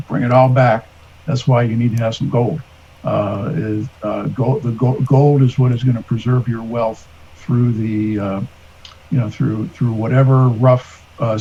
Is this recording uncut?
yes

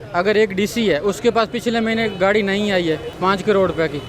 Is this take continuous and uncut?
no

